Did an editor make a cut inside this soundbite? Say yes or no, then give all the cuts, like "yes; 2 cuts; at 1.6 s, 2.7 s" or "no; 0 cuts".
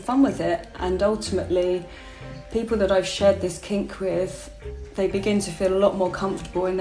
no; 0 cuts